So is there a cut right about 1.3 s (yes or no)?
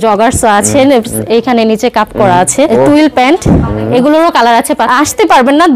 no